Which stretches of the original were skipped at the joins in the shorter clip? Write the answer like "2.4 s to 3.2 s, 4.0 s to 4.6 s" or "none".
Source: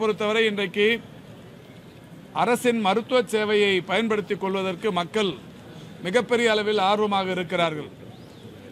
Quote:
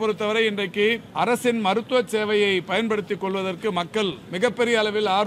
1.1 s to 2.3 s, 5.4 s to 6.0 s